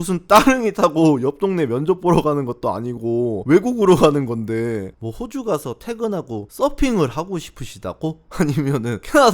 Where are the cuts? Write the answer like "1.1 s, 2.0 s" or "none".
3.4 s, 4.9 s